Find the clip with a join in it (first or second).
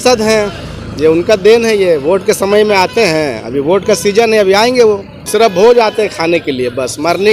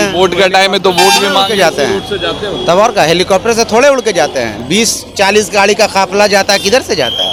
first